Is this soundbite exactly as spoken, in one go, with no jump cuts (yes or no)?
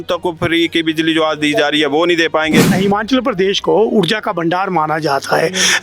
no